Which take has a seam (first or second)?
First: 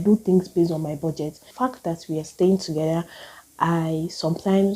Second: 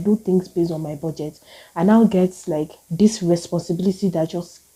first